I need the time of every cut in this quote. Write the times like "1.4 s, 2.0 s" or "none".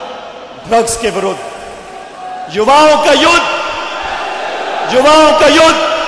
none